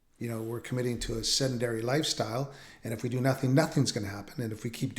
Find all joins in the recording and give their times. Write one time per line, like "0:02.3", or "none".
none